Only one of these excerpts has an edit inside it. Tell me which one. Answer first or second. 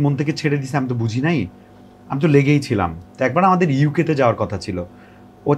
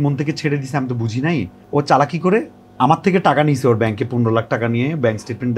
second